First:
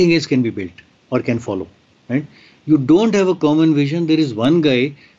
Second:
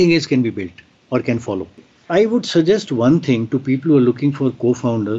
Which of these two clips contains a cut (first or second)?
second